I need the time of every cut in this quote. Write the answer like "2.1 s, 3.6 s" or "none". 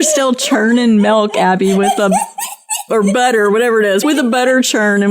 4.0 s